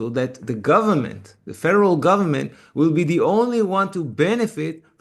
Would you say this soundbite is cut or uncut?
uncut